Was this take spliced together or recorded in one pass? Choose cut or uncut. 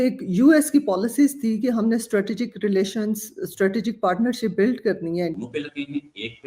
cut